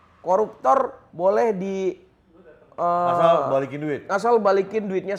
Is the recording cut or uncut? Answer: uncut